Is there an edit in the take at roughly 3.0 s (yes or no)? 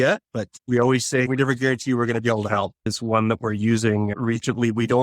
yes